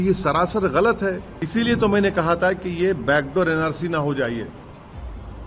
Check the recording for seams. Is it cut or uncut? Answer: cut